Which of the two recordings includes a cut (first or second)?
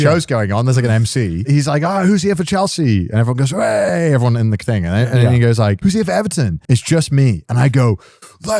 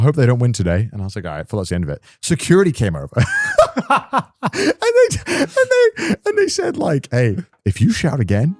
first